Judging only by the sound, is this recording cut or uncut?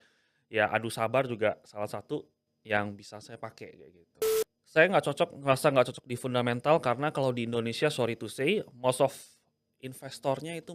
cut